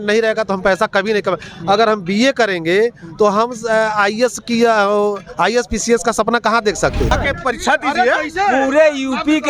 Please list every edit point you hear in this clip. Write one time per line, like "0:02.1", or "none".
0:07.1